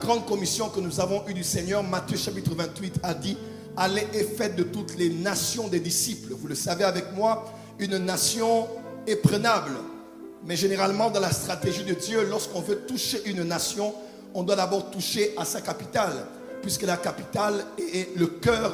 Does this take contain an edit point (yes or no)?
no